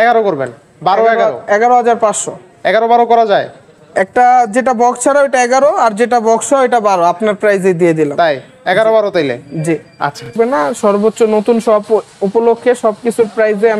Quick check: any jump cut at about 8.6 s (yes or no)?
no